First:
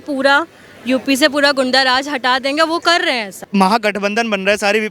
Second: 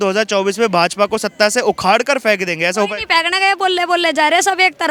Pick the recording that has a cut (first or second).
first